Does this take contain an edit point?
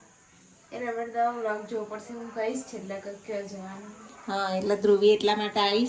no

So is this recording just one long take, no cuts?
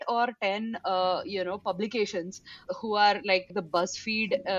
no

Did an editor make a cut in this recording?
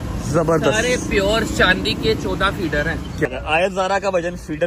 yes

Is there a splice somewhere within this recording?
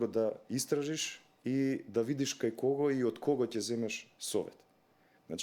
no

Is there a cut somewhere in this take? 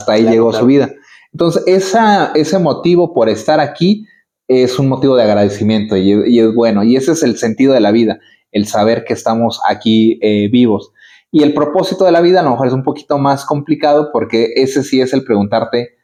no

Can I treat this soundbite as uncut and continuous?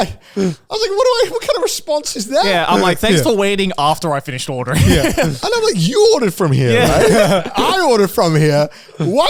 yes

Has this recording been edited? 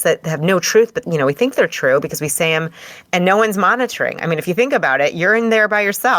yes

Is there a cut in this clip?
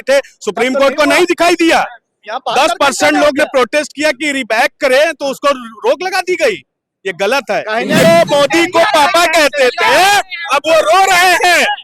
yes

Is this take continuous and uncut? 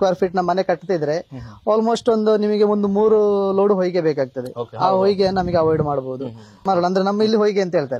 yes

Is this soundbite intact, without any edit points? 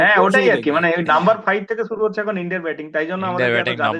yes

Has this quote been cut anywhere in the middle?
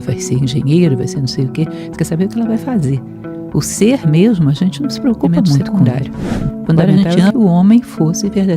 yes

